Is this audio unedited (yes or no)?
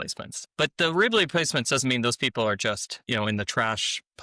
no